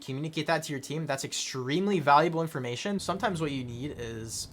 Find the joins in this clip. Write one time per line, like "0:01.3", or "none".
0:03.0